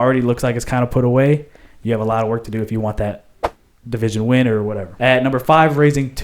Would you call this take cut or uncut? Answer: cut